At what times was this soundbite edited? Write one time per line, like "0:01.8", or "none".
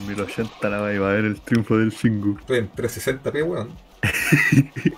0:02.4
0:03.8